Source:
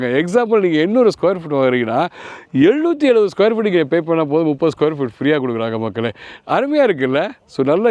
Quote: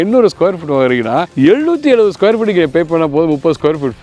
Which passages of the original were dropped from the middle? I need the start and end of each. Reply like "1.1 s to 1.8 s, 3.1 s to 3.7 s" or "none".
2.1 s to 2.5 s